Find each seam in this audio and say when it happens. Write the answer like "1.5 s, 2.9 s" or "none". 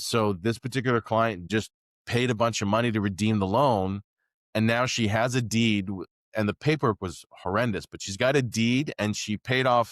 1.5 s